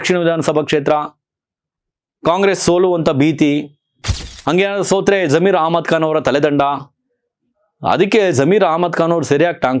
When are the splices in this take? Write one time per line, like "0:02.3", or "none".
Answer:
none